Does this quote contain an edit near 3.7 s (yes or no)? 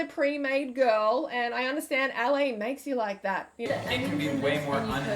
yes